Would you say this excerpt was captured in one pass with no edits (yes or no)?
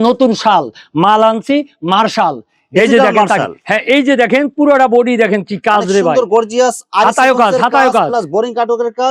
yes